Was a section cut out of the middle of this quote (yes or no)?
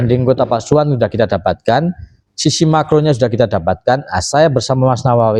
no